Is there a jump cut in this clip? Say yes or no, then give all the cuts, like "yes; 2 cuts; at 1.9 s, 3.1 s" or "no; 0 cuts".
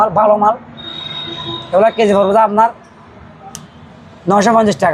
no; 0 cuts